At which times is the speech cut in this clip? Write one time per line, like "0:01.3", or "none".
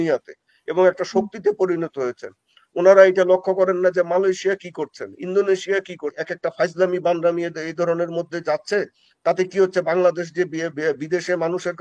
0:06.2